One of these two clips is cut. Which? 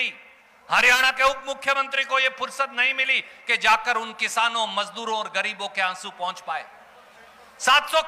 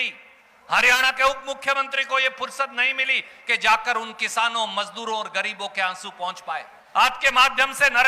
second; 1 cut; at 6.8 s

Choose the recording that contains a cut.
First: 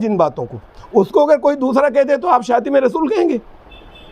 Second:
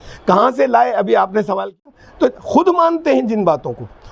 second; 1 cut; at 2.0 s

